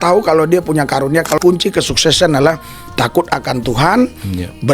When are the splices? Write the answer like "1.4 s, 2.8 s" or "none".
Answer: 1.4 s